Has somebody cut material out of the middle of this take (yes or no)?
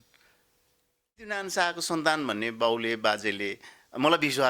yes